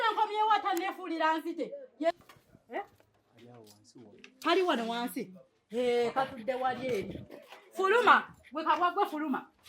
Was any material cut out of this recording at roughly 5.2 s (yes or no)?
no